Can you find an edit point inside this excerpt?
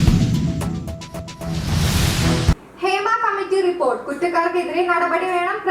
yes; 1 cut; at 1.4 s

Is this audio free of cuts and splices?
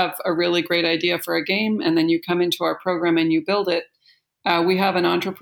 yes; 0 cuts

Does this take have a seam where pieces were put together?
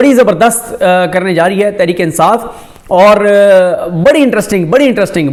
no; 0 cuts

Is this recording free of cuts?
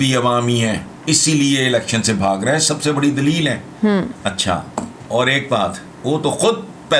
no; 3 cuts; at 0.9 s, 5.0 s, 5.9 s

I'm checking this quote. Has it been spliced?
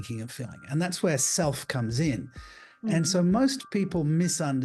no; 0 cuts

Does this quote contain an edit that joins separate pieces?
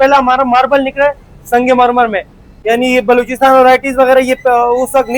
no; 0 cuts

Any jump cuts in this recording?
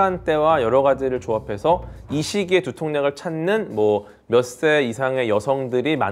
no; 0 cuts

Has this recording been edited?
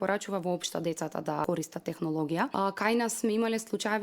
yes; 2 cuts; at 1.4 s, 2.5 s

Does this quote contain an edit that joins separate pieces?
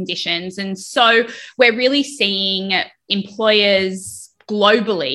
yes; 2 cuts; at 0.8 s, 3.1 s

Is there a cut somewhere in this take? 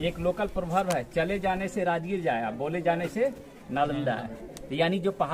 no; 0 cuts

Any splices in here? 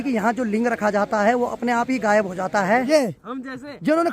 yes; 1 cut; at 2.9 s

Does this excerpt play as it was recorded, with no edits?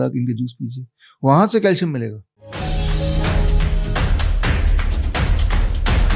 no; 1 cut; at 2.3 s

